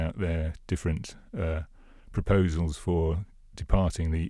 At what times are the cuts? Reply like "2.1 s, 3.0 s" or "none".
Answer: none